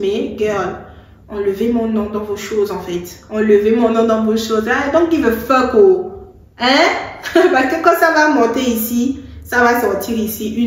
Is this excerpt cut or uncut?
uncut